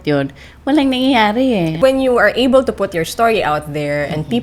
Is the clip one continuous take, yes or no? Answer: no